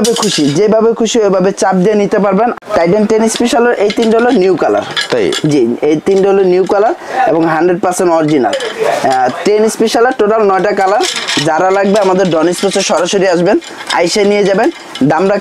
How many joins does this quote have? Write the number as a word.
one